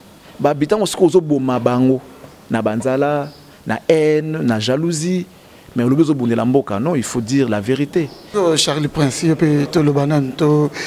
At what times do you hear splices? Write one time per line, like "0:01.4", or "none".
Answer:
0:08.2